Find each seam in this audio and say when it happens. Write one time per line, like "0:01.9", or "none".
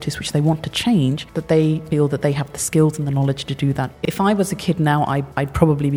0:01.7
0:04.0

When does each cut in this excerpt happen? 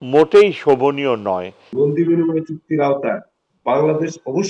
0:01.7

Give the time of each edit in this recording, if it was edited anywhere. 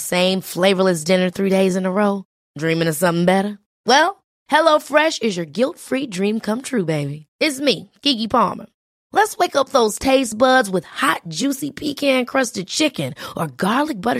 none

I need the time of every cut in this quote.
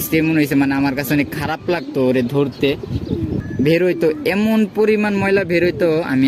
0:03.4

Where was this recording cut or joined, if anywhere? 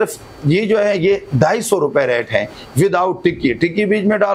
none

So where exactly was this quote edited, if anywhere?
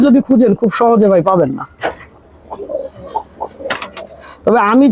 none

